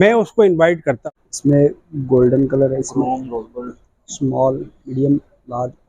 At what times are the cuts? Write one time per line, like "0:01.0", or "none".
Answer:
0:01.0